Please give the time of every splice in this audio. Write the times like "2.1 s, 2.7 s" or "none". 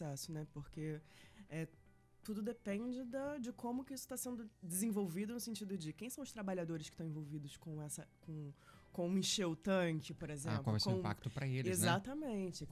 none